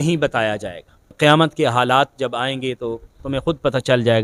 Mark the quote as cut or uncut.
cut